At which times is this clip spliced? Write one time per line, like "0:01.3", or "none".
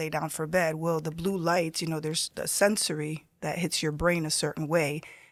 none